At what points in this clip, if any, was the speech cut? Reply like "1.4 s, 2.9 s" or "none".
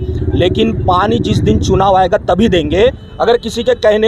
3.1 s